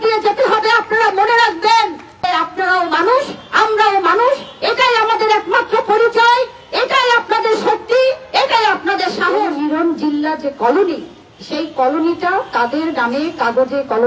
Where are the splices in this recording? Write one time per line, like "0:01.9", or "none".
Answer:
0:02.2
0:09.5